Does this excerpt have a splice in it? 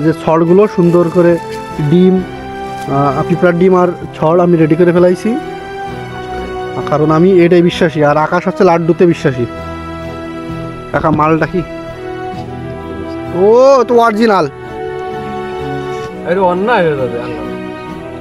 no; 0 cuts

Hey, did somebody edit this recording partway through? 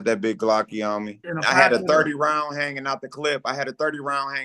yes; 1 cut; at 1.2 s

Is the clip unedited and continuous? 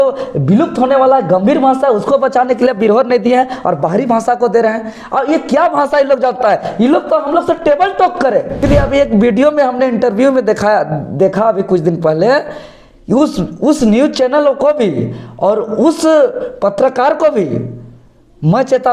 no; 1 cut; at 8.6 s

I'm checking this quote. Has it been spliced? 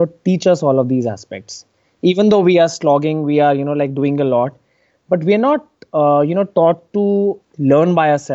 yes; 1 cut; at 7.4 s

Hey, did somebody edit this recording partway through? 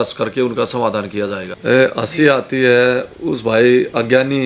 yes; 1 cut; at 1.5 s

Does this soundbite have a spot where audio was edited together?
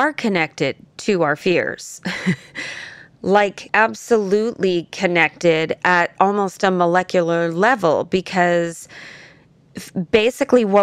yes; 1 cut; at 3.6 s

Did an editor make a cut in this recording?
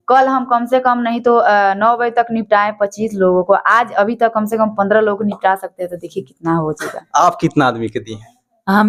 no; 0 cuts

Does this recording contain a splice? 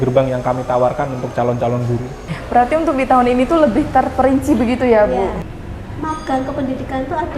yes; 2 cuts; at 2.3 s, 5.4 s

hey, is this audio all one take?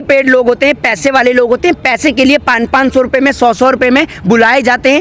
yes; 0 cuts

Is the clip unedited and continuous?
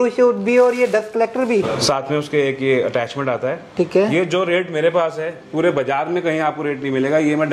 no; 1 cut; at 1.7 s

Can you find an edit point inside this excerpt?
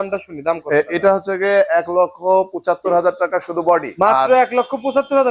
yes; 1 cut; at 3.9 s

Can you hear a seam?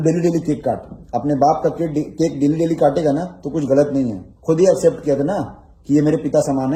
no; 0 cuts

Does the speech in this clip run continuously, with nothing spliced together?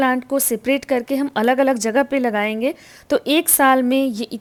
yes; 0 cuts

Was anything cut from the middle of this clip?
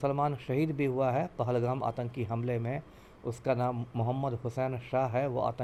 no; 0 cuts

